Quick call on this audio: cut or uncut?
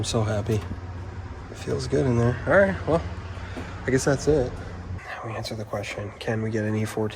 cut